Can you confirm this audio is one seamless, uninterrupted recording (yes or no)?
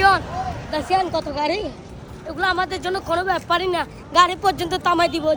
yes